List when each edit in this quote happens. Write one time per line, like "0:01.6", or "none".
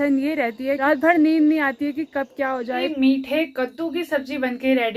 0:00.8
0:02.9